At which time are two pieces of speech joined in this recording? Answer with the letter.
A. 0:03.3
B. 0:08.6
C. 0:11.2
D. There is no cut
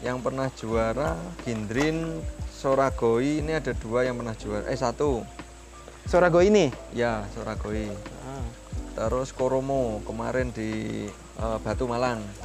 C